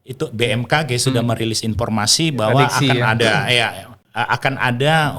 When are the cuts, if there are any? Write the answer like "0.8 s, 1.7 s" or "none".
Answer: 4.0 s